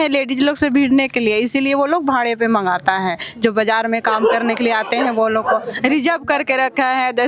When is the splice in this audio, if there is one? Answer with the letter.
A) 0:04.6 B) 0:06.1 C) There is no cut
C